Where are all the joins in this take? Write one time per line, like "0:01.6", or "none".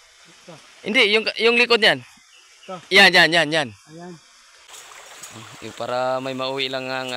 0:04.7